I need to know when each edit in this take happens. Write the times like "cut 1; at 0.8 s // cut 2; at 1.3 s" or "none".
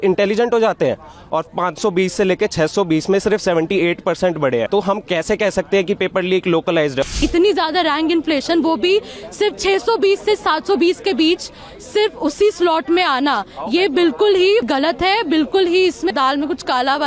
cut 1; at 4.7 s // cut 2; at 7.1 s // cut 3; at 14.7 s // cut 4; at 16.1 s